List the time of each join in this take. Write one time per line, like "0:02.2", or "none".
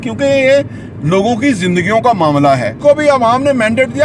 0:02.8